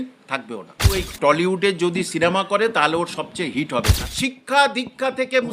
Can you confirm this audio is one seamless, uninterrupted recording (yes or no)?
no